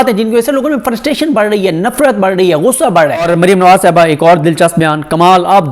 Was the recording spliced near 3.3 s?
yes; 1 cut; at 3.3 s

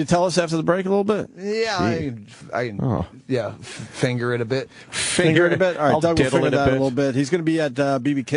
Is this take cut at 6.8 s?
no; 1 cut; at 2.3 s

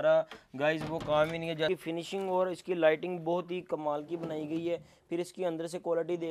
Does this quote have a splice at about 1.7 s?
yes; 1 cut; at 1.7 s

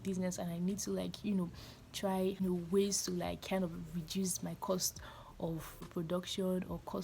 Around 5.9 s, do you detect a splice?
yes; 2 cuts; at 2.4 s, 5.9 s

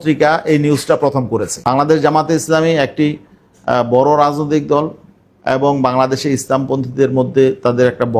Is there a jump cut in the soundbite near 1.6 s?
yes; 1 cut; at 1.6 s

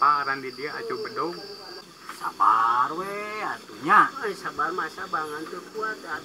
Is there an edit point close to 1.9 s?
yes; 1 cut; at 1.9 s

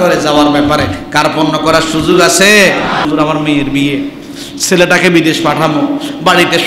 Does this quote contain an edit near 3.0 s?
yes; 1 cut; at 3.0 s

